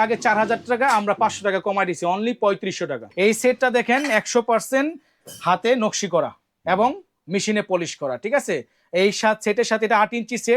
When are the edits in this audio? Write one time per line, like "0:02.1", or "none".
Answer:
0:03.0

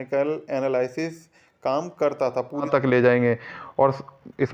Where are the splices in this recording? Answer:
0:02.7

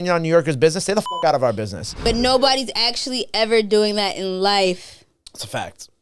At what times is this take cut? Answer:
0:02.1

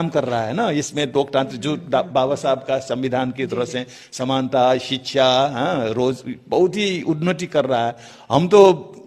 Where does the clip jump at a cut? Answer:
none

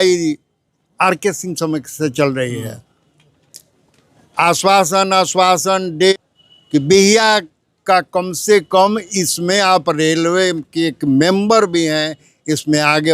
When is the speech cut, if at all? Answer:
0:06.1

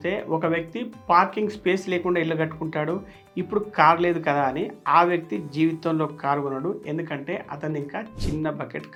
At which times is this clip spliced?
none

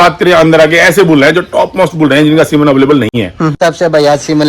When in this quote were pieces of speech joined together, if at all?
0:03.6

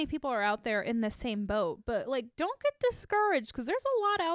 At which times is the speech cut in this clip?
none

